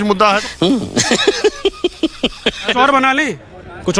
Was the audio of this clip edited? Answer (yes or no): no